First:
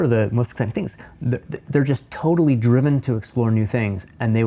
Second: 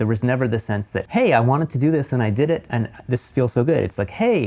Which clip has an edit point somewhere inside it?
second; 2 cuts; at 1.0 s, 2.7 s

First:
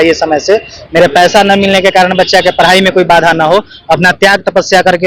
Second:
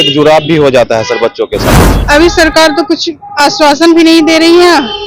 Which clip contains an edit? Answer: second; 1 cut; at 1.9 s

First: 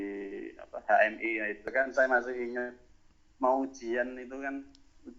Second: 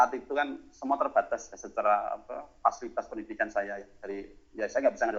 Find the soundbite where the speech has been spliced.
first; 1 cut; at 1.6 s

